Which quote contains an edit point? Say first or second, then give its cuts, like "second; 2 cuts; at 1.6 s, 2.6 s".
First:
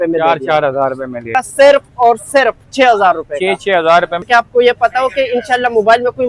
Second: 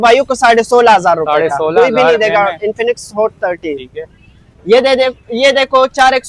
first; 2 cuts; at 1.3 s, 4.2 s